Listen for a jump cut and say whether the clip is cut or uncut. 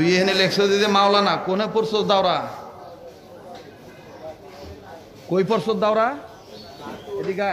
cut